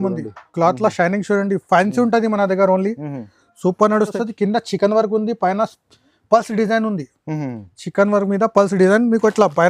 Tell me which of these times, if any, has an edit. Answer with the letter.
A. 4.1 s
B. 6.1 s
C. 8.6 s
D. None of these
A